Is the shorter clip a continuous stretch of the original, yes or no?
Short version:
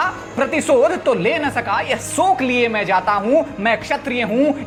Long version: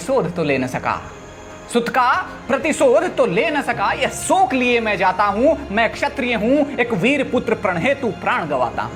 yes